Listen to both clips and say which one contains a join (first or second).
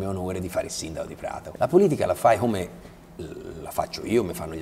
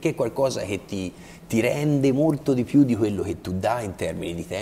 first